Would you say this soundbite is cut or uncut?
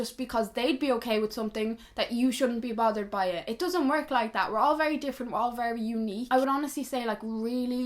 uncut